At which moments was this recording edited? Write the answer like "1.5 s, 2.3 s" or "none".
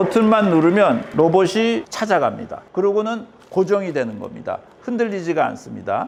none